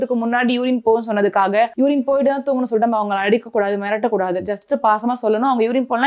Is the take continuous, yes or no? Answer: yes